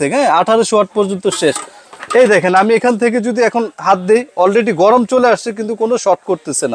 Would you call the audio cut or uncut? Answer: uncut